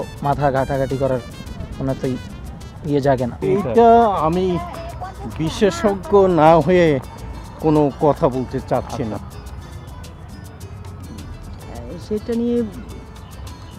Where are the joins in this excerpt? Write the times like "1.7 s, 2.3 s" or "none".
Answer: none